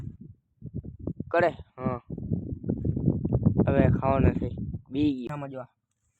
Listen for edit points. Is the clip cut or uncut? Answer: cut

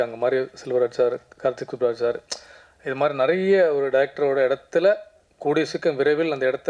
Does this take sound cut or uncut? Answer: uncut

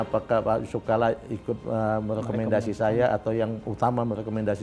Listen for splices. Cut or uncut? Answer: uncut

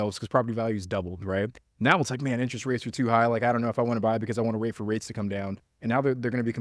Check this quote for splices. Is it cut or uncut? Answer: uncut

